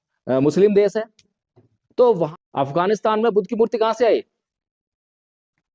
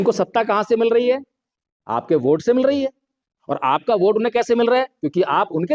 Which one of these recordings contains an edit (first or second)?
first